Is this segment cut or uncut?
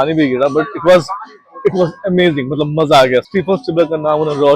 cut